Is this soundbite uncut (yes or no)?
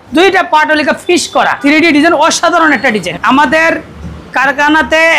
no